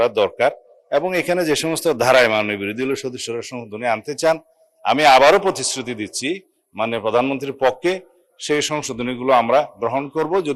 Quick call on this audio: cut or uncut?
uncut